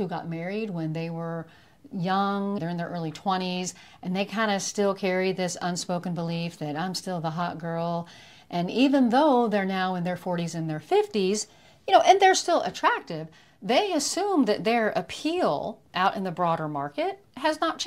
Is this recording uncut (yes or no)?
yes